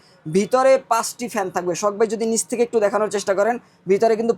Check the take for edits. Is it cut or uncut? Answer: uncut